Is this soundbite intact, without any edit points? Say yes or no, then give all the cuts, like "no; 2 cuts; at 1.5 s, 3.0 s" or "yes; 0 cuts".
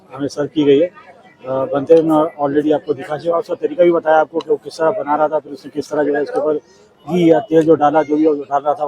yes; 0 cuts